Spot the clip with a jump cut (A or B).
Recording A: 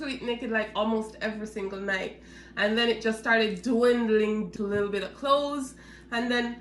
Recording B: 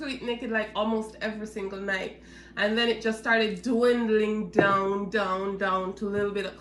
A